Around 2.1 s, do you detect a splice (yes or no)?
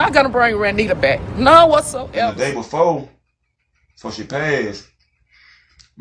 yes